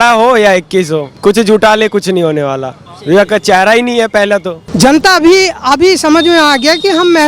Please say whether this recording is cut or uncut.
cut